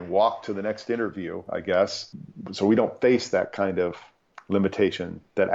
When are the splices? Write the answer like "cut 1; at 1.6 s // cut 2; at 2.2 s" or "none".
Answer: cut 1; at 2.1 s // cut 2; at 4.3 s